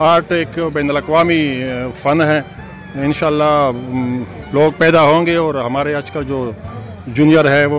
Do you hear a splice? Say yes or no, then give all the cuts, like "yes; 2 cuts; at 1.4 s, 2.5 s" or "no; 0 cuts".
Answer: no; 0 cuts